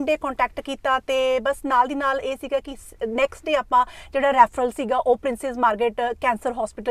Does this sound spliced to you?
no; 0 cuts

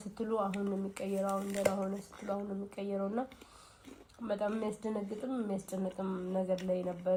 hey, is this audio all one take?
yes; 0 cuts

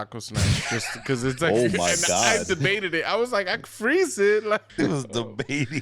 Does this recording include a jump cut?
yes; 1 cut; at 4.7 s

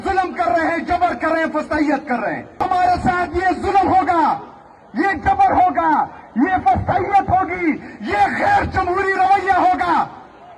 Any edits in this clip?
yes; 1 cut; at 2.6 s

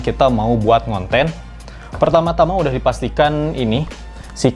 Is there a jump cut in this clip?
no; 0 cuts

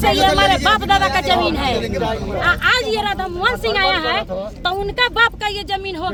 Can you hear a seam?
no; 0 cuts

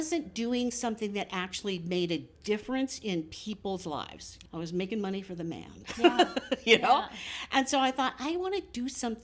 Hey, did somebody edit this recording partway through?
yes; 1 cut; at 4.3 s

